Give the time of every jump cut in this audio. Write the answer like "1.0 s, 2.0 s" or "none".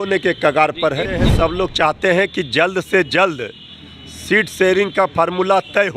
1.3 s